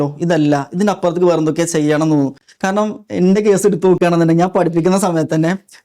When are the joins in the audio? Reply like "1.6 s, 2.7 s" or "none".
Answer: none